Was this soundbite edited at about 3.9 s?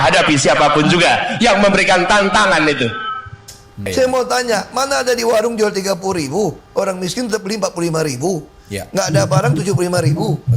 yes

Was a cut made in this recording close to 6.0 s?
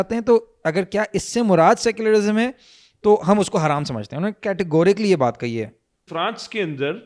yes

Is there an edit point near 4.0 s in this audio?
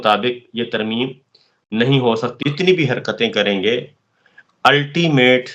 no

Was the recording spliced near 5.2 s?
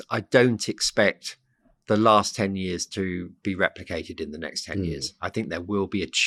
no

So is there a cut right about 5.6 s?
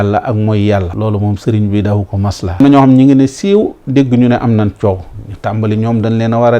no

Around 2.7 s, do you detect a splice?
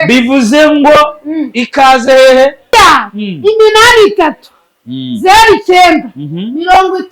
yes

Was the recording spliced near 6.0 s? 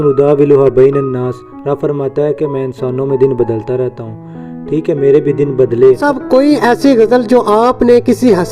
yes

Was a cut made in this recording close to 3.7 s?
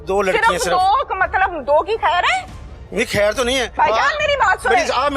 yes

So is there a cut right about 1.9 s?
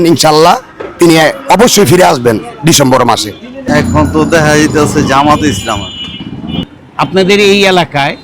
no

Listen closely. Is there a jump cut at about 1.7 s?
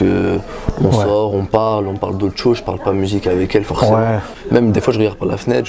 no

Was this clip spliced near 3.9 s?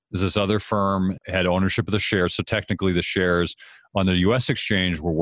no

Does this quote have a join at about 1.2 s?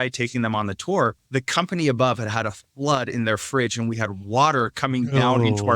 yes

